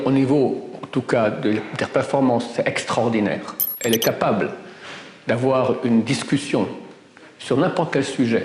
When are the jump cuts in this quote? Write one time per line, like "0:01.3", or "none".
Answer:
0:03.7